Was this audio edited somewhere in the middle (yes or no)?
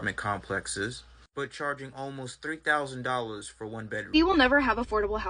yes